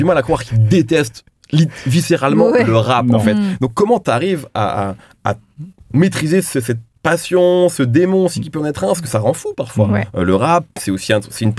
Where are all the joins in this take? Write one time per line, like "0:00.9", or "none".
none